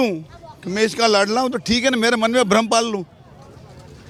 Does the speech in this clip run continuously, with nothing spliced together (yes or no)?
yes